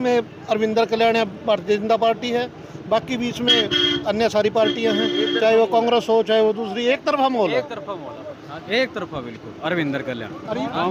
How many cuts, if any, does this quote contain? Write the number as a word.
zero